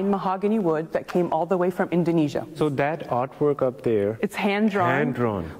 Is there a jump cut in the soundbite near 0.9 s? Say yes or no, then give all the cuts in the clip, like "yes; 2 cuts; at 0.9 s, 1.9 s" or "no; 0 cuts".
yes; 3 cuts; at 0.9 s, 2.6 s, 4.2 s